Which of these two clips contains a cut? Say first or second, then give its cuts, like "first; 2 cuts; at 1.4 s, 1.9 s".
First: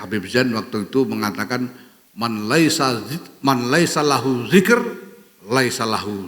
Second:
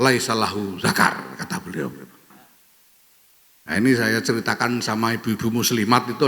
second; 1 cut; at 2.3 s